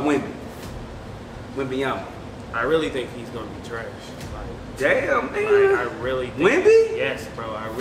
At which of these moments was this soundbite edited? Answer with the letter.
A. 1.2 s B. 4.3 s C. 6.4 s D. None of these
B